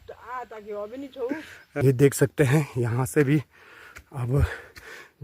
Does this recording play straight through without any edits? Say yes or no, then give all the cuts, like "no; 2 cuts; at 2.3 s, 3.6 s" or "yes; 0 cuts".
no; 1 cut; at 1.8 s